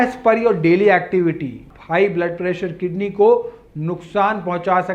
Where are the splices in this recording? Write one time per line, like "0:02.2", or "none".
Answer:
0:01.7

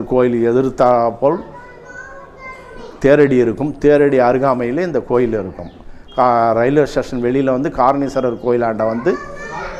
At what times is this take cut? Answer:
none

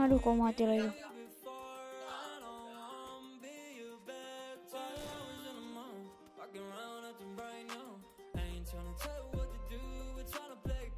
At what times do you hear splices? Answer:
0:01.0

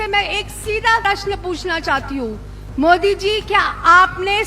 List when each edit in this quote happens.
0:01.0

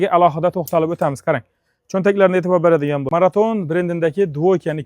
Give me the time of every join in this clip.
0:03.0

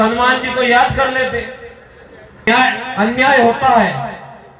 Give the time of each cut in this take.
0:02.5

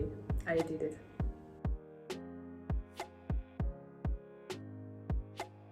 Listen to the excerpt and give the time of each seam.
none

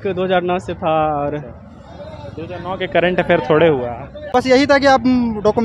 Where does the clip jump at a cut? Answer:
0:04.3

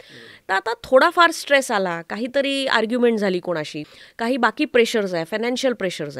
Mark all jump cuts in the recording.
0:03.8

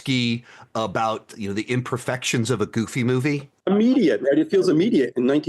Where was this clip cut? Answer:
0:03.6

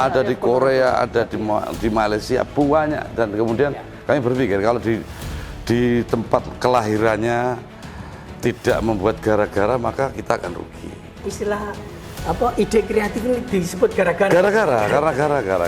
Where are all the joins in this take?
0:11.1

